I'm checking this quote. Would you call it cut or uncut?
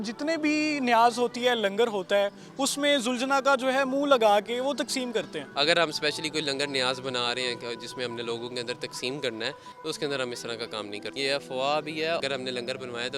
cut